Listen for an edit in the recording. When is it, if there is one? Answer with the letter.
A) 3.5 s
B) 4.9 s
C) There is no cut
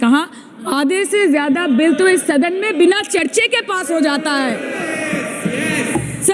C